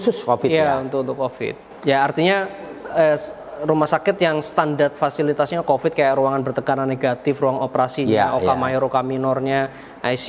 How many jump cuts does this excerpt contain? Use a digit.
1